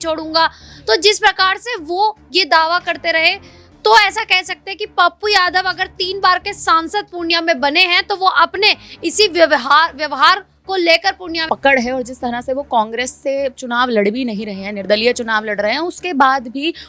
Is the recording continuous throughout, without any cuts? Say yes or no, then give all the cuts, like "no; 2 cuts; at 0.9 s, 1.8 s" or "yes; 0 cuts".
no; 1 cut; at 11.4 s